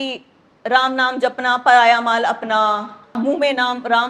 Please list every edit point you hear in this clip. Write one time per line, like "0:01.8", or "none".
0:03.1